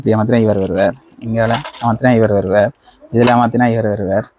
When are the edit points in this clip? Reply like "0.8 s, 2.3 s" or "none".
none